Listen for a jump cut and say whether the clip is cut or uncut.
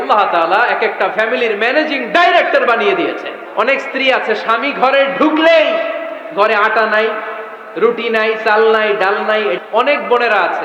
cut